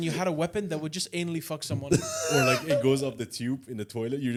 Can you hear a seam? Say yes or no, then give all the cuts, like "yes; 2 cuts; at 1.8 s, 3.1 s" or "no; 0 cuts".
no; 0 cuts